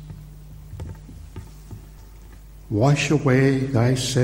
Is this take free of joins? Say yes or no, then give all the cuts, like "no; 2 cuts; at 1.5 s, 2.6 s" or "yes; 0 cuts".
no; 1 cut; at 2.0 s